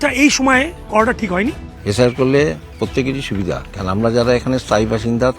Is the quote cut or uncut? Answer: uncut